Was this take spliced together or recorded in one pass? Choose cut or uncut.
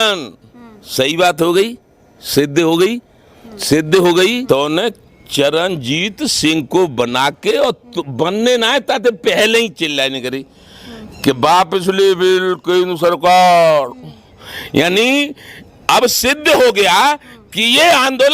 cut